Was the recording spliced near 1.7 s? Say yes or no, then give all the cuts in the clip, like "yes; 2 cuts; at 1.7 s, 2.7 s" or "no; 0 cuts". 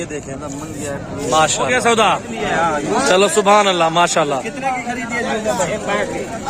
yes; 1 cut; at 1.7 s